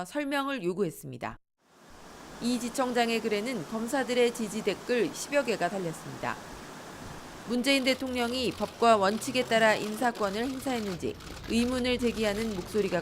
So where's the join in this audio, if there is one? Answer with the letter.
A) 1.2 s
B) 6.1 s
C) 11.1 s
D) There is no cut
A